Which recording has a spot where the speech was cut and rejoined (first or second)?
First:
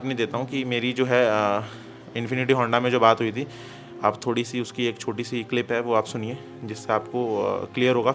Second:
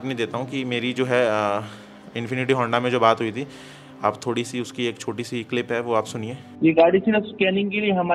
second